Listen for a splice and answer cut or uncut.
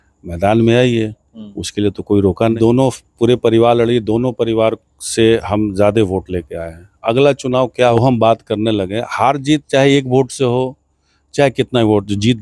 cut